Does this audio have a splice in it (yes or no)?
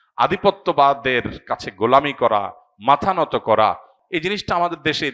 yes